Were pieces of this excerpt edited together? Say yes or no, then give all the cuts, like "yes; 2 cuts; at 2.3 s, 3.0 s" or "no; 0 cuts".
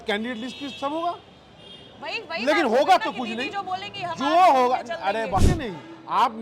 yes; 1 cut; at 5.4 s